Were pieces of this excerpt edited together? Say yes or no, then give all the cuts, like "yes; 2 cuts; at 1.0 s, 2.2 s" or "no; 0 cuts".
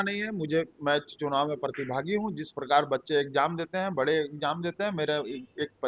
no; 0 cuts